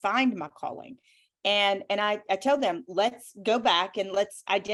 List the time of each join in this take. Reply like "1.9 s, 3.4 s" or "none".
none